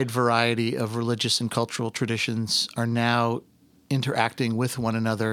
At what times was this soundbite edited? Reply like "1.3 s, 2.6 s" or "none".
none